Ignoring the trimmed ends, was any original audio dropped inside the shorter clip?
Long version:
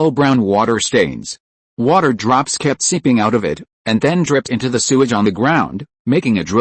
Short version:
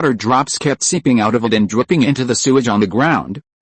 yes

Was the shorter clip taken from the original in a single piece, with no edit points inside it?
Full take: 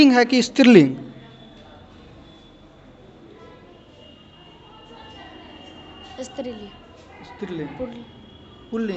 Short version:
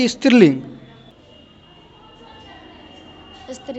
no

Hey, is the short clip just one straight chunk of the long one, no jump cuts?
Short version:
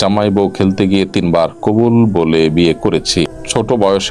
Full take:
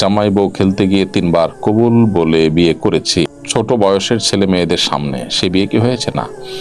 yes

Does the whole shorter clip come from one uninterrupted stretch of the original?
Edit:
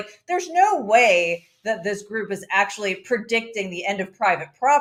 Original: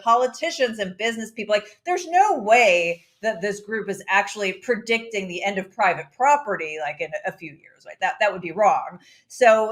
yes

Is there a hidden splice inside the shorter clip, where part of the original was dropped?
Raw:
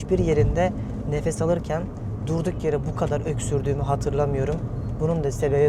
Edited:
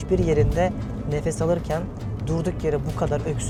no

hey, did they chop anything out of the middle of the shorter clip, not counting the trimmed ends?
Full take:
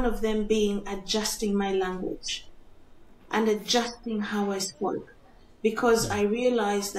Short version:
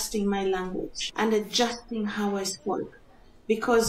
yes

